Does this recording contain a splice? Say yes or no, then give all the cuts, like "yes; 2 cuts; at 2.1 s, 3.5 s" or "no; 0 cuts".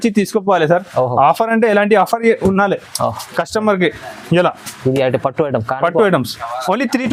no; 0 cuts